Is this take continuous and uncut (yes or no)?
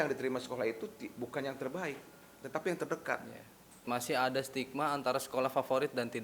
no